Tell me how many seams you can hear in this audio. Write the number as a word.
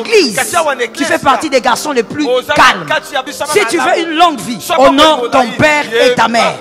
two